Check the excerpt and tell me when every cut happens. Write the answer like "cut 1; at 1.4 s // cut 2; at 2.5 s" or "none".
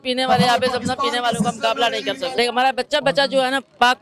cut 1; at 2.3 s